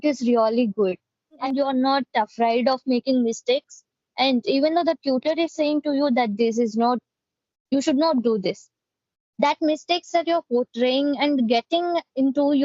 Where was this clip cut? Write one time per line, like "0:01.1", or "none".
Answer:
0:01.4